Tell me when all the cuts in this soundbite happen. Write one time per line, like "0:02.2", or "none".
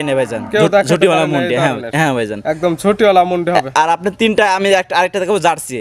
none